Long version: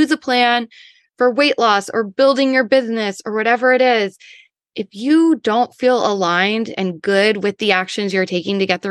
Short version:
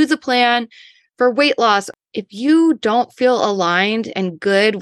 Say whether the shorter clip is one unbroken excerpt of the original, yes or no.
no